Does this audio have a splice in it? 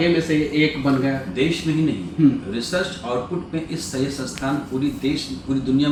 no; 0 cuts

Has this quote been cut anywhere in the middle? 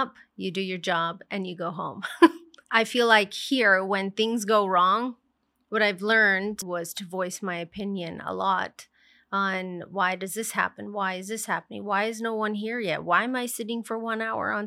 yes; 2 cuts; at 2.6 s, 6.6 s

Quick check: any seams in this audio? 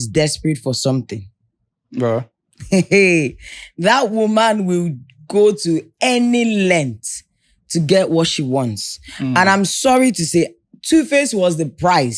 no; 0 cuts

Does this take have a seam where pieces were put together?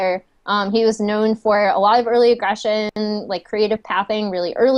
no; 0 cuts

